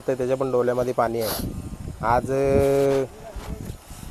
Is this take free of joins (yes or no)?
yes